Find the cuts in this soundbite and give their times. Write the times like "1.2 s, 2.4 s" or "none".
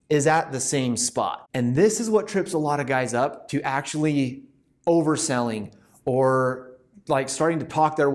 1.4 s